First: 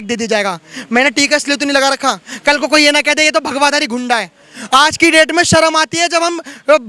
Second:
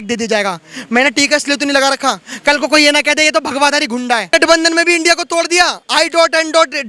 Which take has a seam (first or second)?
second